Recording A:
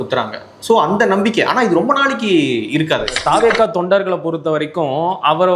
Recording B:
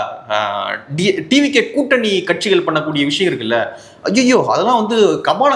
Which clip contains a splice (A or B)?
A